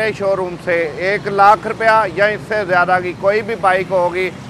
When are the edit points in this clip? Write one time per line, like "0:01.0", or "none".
none